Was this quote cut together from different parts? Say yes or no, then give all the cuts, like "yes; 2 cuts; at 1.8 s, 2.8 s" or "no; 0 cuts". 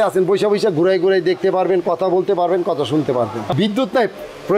yes; 1 cut; at 3.4 s